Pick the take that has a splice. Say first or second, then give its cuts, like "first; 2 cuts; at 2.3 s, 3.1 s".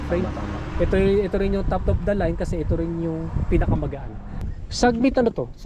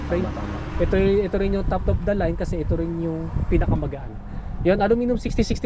first; 1 cut; at 4.5 s